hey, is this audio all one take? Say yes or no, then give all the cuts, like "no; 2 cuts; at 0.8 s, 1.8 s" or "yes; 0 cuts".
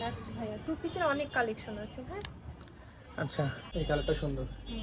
no; 1 cut; at 3.6 s